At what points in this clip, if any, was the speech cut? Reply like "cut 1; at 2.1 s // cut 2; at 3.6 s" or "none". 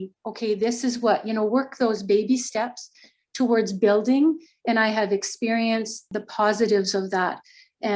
cut 1; at 6.0 s